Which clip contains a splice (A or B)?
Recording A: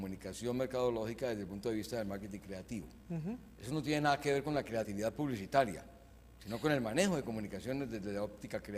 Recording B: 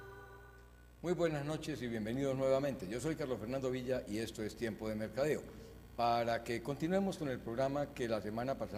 A